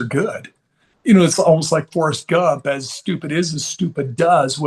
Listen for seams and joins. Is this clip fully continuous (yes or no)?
yes